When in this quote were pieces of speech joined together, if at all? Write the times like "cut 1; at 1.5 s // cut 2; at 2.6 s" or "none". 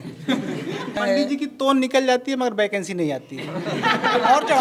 cut 1; at 1.0 s